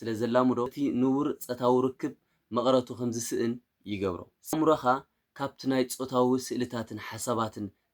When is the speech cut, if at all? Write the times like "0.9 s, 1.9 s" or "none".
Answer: 4.5 s